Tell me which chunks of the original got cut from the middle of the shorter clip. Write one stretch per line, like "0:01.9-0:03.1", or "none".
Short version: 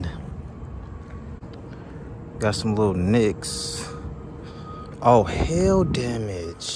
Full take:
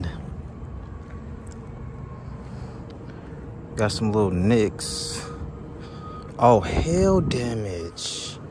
0:01.4-0:02.8